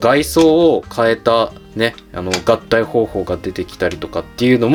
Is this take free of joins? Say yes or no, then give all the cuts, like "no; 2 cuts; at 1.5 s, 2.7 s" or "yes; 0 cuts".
yes; 0 cuts